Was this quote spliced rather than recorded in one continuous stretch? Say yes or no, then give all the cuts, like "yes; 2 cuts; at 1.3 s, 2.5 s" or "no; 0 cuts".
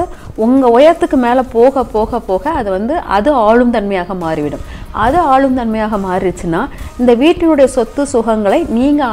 no; 0 cuts